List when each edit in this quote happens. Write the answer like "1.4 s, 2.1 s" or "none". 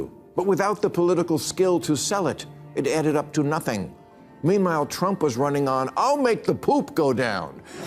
none

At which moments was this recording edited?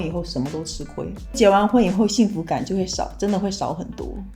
none

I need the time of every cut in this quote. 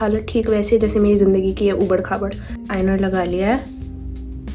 2.7 s

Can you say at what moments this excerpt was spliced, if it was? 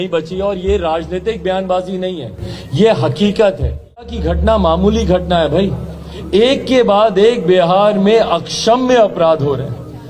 4.2 s

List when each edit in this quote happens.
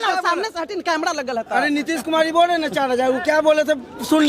none

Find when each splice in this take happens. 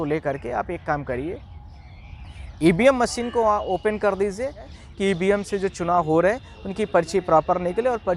4.8 s

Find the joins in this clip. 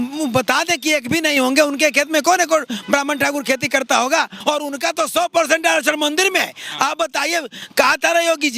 4.3 s

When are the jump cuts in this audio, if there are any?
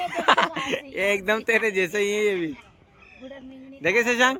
none

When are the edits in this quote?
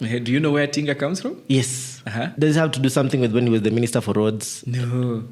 2.3 s

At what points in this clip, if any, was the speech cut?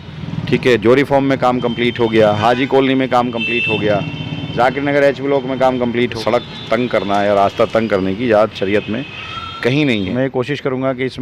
6.1 s, 10.0 s

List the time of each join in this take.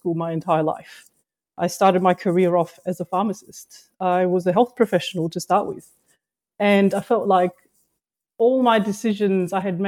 none

